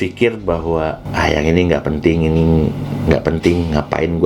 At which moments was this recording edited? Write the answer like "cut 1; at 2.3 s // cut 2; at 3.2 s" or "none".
cut 1; at 1.0 s